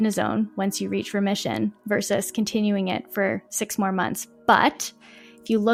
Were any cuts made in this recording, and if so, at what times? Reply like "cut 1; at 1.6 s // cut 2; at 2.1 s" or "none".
none